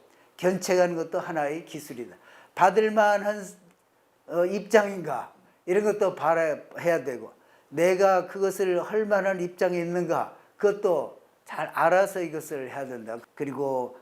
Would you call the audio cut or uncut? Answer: cut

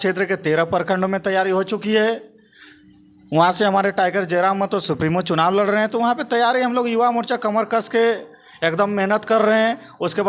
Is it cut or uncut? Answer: uncut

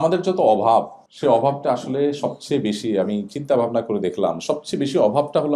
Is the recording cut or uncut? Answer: cut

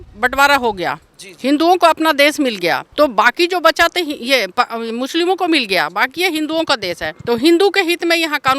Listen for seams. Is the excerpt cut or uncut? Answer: cut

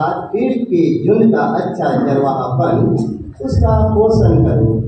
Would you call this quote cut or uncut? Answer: uncut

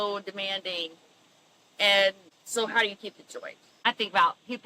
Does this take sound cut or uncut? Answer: cut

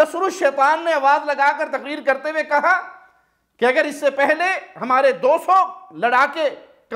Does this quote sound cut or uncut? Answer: uncut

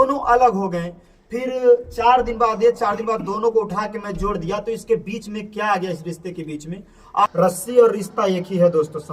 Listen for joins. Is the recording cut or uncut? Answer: cut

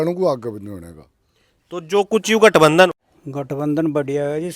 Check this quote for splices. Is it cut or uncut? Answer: cut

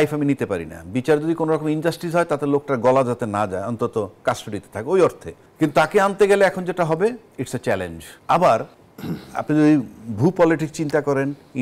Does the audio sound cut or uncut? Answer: uncut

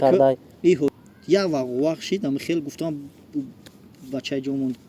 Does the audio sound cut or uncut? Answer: cut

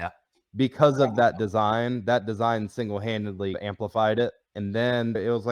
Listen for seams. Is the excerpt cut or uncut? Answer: uncut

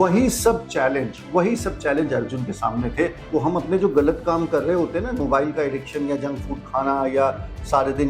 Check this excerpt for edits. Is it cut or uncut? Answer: cut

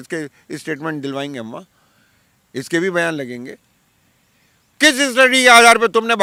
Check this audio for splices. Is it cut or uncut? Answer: uncut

